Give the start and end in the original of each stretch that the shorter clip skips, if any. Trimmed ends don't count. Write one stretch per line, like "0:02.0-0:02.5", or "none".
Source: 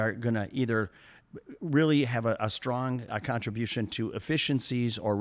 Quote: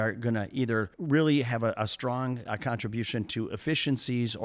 0:01.0-0:01.6